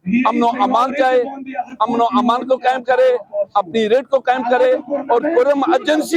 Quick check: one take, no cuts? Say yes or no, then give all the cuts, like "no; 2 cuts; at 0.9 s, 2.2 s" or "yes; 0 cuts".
yes; 0 cuts